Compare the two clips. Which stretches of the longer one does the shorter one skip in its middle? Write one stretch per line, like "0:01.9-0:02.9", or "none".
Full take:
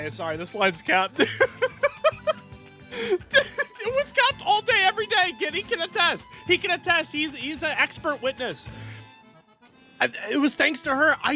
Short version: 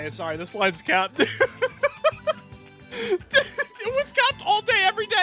none